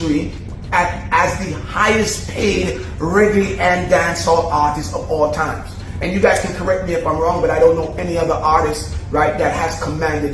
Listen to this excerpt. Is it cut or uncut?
uncut